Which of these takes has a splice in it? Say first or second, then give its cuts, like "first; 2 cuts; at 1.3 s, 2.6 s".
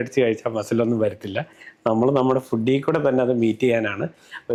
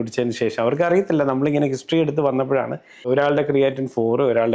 second; 1 cut; at 3.0 s